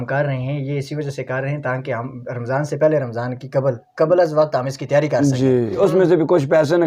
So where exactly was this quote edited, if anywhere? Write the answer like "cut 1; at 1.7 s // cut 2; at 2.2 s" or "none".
cut 1; at 5.8 s